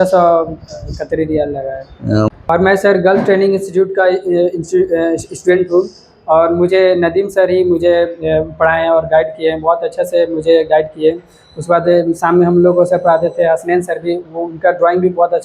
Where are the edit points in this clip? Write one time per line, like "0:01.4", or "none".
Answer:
0:02.3